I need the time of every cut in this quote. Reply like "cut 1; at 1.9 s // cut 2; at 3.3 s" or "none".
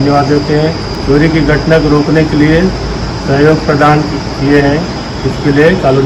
cut 1; at 0.9 s

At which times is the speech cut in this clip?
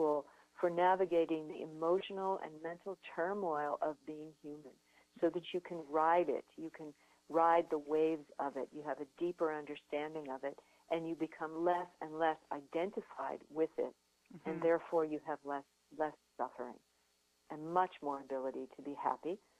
none

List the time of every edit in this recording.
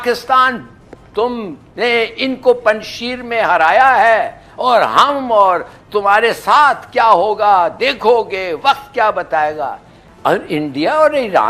cut 1; at 10.0 s

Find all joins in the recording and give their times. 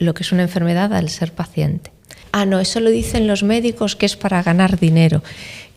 cut 1; at 2.2 s

